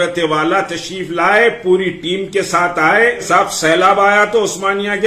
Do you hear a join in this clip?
yes; 1 cut; at 3.2 s

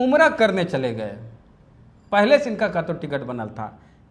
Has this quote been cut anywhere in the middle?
no; 0 cuts

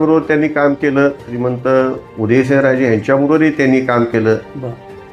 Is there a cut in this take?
yes; 1 cut; at 1.3 s

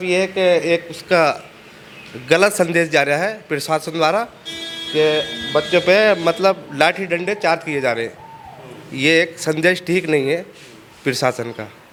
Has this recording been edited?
no; 0 cuts

